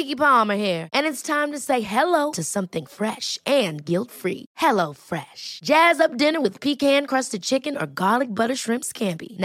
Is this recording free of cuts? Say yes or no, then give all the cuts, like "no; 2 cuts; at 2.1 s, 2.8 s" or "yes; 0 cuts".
yes; 0 cuts